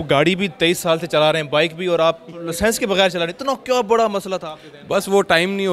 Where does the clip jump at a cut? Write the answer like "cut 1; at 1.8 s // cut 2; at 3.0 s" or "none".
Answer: none